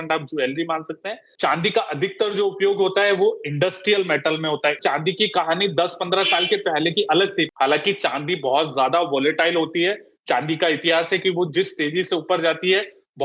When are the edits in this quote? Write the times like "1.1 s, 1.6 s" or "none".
1.2 s, 4.8 s, 7.5 s